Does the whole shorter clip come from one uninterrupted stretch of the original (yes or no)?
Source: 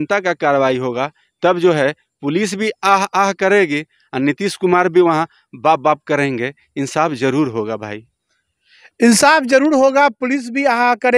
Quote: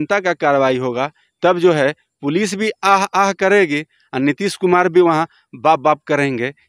yes